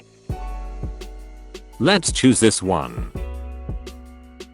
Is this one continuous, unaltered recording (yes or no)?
no